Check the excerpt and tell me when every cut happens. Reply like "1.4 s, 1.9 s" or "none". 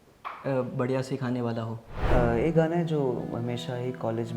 1.9 s